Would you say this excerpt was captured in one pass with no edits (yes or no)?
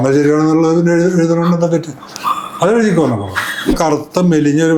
no